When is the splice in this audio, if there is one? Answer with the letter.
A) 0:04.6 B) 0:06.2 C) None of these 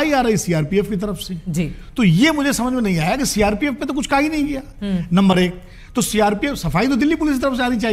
C